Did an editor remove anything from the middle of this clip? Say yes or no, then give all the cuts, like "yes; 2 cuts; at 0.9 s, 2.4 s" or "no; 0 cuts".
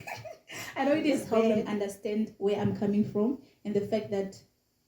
yes; 1 cut; at 1.2 s